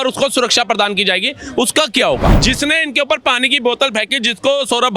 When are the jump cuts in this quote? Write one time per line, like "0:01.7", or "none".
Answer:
0:02.4